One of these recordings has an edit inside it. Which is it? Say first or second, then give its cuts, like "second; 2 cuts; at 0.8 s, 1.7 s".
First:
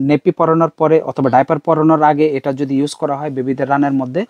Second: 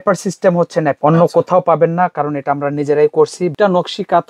second; 2 cuts; at 1.0 s, 3.5 s